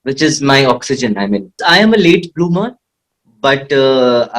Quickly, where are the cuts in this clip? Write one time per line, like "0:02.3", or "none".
0:01.6